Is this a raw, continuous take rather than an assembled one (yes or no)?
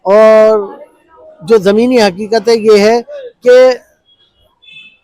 yes